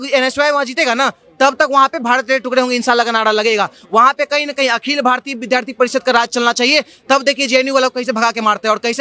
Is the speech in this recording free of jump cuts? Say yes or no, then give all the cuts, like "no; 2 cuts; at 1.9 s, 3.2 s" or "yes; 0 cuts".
yes; 0 cuts